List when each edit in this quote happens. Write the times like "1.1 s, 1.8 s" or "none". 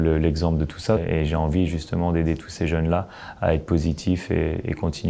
1.0 s